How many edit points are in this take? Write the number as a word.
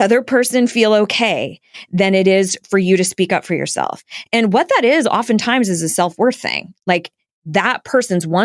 one